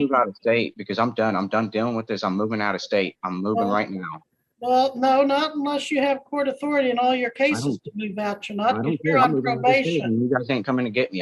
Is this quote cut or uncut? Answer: uncut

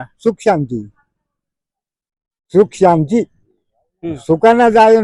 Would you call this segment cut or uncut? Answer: uncut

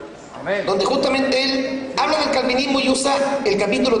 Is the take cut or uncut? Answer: uncut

